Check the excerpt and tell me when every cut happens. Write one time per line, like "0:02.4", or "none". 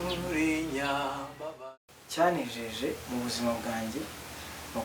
0:01.6